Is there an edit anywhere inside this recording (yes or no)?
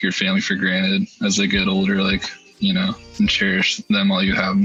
no